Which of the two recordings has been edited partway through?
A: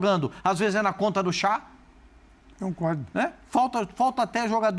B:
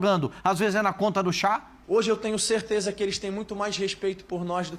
B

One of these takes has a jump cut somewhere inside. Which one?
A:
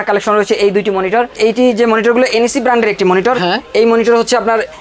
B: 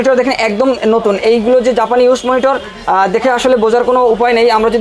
A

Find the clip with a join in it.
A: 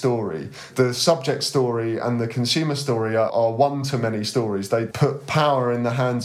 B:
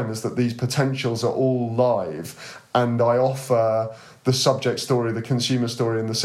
A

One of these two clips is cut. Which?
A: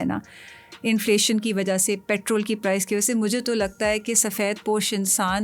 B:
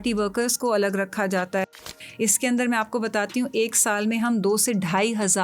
B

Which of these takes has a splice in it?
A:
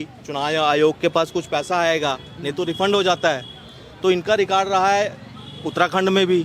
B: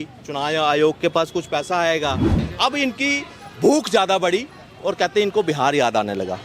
B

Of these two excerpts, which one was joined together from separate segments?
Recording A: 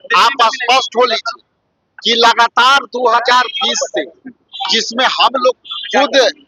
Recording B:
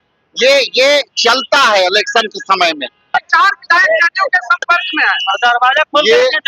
B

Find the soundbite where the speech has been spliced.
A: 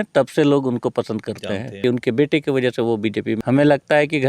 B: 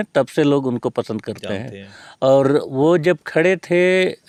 A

